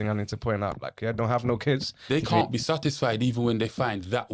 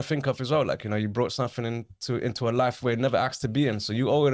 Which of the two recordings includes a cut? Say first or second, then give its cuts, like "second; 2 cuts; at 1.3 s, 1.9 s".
first; 1 cut; at 1.9 s